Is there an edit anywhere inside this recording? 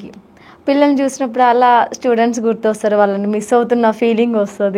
no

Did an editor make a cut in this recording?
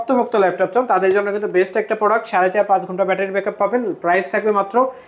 no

